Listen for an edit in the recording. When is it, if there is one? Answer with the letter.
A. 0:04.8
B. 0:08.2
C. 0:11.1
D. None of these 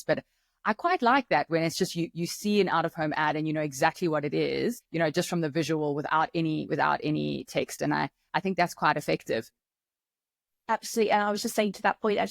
A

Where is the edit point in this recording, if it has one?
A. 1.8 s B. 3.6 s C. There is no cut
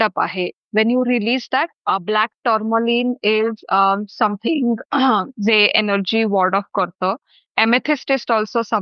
A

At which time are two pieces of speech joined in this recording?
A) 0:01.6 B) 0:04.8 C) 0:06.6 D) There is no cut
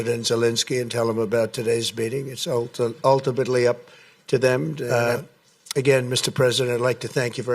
B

